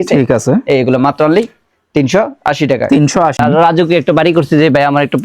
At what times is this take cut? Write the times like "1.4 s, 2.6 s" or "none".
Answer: 3.4 s